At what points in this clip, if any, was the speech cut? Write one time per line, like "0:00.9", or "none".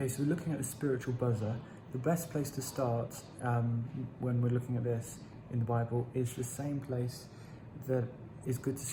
none